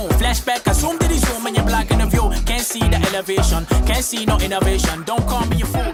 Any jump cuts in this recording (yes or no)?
no